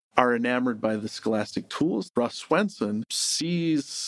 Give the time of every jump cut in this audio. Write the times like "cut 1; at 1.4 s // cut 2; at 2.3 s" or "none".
cut 1; at 2.1 s // cut 2; at 3.1 s